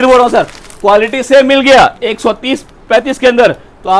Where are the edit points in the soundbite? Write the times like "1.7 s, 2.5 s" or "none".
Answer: none